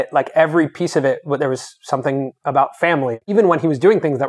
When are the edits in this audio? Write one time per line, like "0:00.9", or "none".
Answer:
0:03.3